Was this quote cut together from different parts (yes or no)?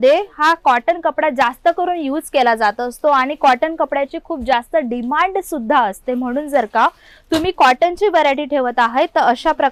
no